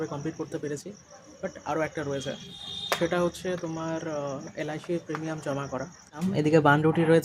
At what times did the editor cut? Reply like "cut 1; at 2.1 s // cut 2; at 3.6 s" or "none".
cut 1; at 6.3 s